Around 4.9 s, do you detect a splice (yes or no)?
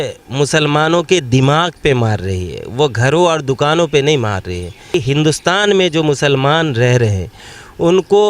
yes